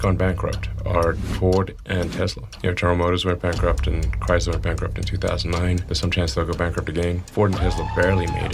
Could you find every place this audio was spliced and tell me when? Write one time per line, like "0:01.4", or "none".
0:02.5
0:05.8
0:07.3